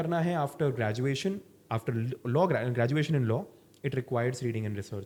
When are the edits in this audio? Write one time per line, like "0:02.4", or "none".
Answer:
none